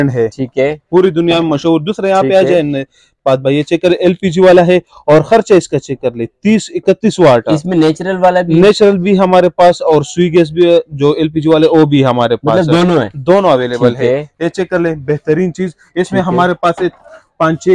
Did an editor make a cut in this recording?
no; 0 cuts

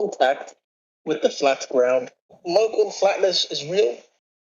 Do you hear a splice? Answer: yes; 1 cut; at 2.4 s

